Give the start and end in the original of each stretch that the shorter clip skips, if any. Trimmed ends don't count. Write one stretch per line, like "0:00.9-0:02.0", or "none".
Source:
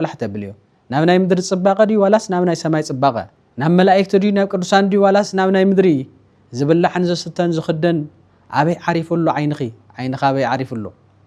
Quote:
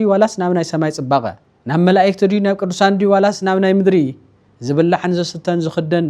none